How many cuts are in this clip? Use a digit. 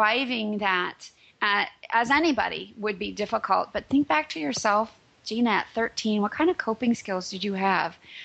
0